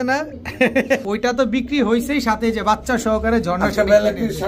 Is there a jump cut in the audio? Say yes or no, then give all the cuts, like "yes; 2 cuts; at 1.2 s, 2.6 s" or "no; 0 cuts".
yes; 1 cut; at 1.0 s